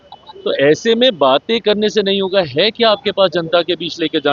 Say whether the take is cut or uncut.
uncut